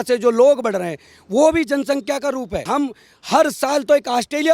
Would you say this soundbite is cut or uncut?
cut